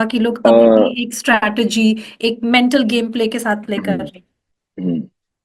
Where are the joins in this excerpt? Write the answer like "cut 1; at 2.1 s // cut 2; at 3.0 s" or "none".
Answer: none